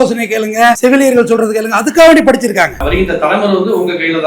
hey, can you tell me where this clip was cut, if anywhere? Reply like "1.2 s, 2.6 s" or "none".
2.8 s

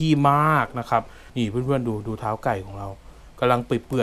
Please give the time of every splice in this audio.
1.2 s

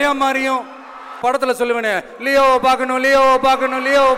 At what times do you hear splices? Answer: 1.2 s

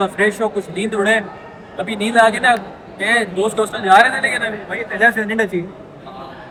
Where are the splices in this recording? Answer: none

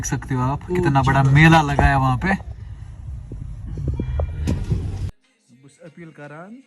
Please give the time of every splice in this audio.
5.1 s

